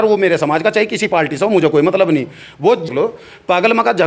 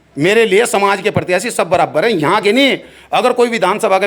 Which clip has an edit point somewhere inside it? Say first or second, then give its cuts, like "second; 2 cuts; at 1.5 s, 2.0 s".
first; 1 cut; at 2.9 s